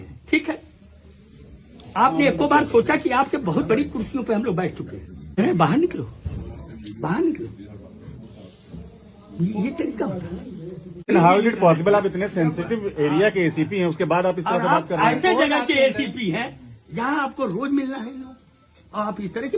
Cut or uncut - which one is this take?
cut